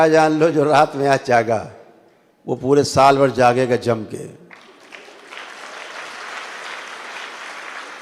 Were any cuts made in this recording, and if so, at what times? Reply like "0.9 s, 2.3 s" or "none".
none